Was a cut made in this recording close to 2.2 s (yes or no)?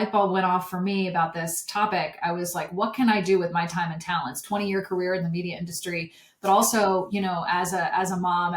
no